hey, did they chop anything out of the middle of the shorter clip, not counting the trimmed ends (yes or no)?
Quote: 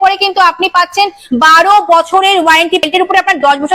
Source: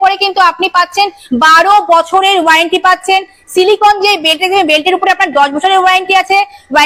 yes